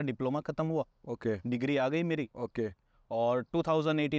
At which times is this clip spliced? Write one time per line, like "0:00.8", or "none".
none